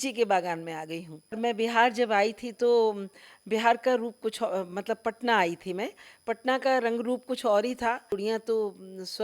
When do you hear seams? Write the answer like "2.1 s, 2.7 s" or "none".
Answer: 1.4 s, 8.1 s